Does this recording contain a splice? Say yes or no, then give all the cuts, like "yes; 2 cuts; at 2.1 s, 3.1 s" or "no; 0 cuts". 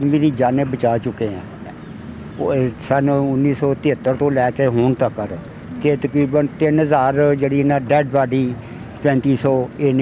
no; 0 cuts